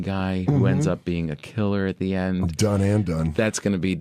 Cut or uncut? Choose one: cut